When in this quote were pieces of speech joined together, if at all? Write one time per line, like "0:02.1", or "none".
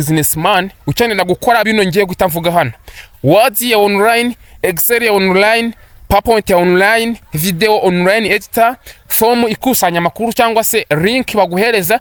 none